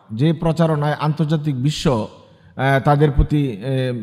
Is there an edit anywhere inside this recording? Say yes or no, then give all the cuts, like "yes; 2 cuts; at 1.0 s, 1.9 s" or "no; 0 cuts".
no; 0 cuts